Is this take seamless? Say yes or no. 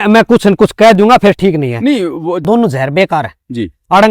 no